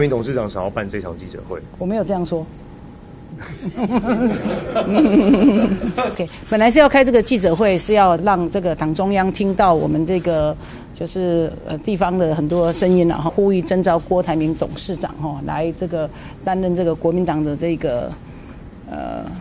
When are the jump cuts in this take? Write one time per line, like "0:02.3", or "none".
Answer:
0:06.2
0:08.2
0:13.3